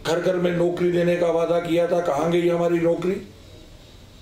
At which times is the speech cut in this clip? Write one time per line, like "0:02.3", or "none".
none

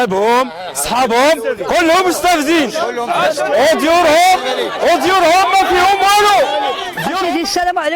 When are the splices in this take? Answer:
0:06.8

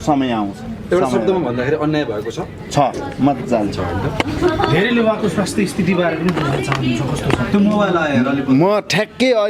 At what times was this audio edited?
none

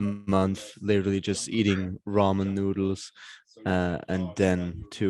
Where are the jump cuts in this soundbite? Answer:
none

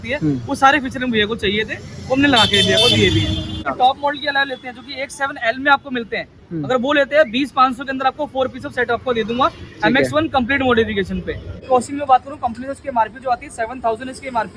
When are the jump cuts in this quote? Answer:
0:03.6
0:11.5

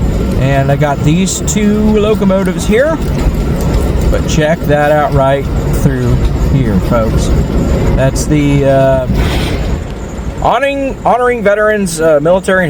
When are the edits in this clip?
none

